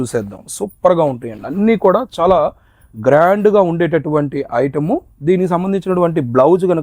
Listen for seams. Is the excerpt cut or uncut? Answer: uncut